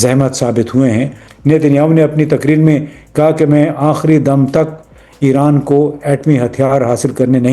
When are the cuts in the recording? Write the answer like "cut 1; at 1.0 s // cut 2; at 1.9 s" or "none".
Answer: cut 1; at 1.3 s